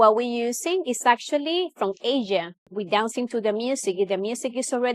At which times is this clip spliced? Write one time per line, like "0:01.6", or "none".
0:02.7

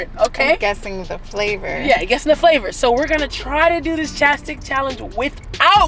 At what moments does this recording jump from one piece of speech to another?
none

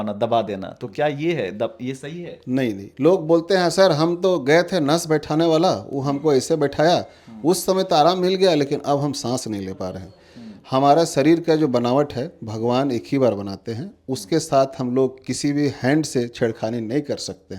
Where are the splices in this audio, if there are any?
none

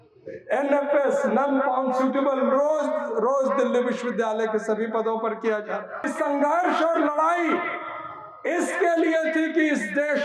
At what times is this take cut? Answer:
0:06.1

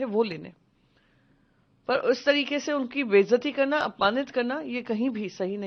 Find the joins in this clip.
none

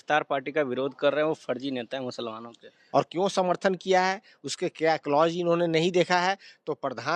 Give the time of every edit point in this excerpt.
0:02.8

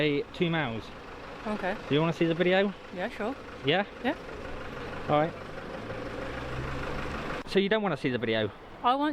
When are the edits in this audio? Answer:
none

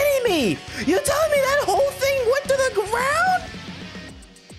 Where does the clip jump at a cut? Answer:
none

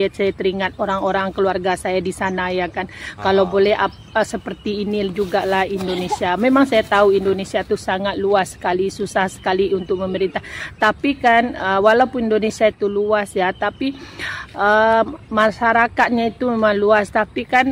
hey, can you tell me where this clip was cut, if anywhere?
none

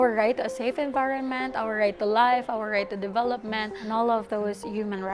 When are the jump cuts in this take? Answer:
0:03.8

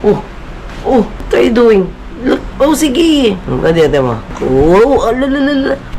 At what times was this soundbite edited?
0:01.2
0:02.5
0:03.4
0:04.3

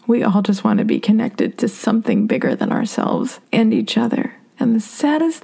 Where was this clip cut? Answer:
0:03.4
0:04.4

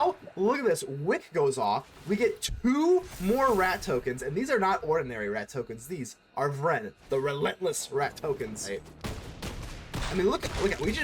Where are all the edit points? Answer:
0:08.7

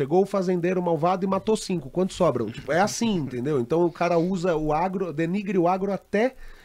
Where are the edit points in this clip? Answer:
none

